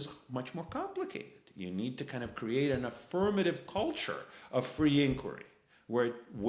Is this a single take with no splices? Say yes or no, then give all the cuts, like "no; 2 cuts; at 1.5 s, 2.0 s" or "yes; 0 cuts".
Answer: yes; 0 cuts